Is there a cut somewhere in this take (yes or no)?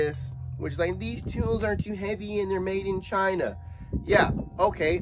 no